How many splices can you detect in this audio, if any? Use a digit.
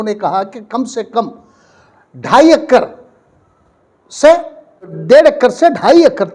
1